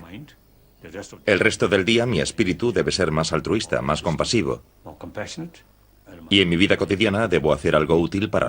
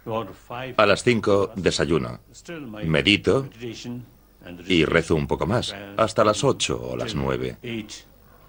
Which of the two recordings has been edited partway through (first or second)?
first